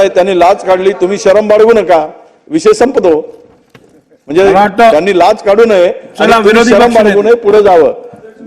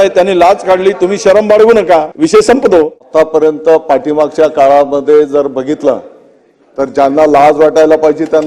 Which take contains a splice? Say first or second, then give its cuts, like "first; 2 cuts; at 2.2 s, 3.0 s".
second; 2 cuts; at 2.1 s, 3.0 s